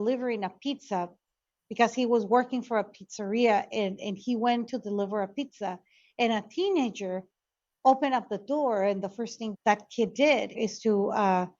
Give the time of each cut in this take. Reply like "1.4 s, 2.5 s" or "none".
9.4 s

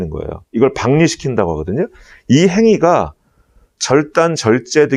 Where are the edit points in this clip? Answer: none

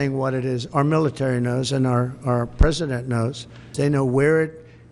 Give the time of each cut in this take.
3.7 s

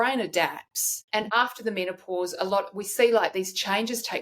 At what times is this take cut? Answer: 1.2 s

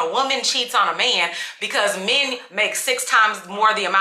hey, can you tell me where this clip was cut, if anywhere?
none

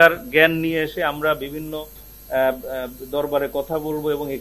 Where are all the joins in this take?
none

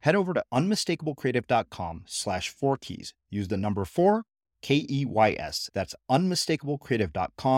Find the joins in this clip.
none

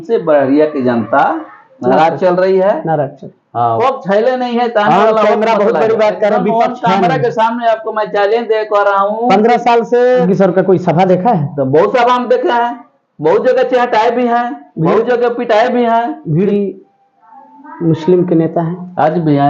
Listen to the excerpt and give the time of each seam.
3.8 s, 10.2 s, 16.5 s

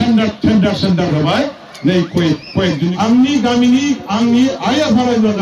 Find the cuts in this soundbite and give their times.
2.9 s

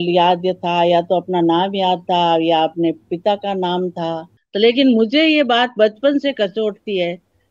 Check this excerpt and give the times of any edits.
4.3 s

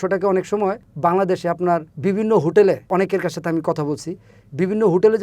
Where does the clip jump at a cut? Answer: 0.9 s, 1.9 s, 2.9 s

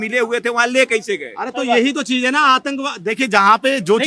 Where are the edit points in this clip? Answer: none

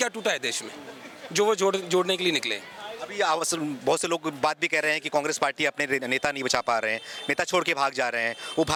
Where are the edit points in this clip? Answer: none

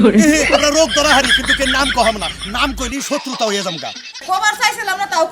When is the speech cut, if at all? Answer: 4.2 s

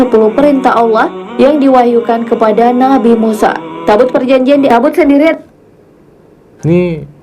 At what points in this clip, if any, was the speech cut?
4.7 s

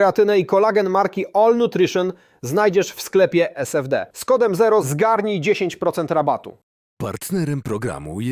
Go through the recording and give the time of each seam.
none

